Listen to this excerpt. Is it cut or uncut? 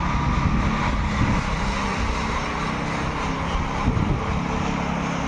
uncut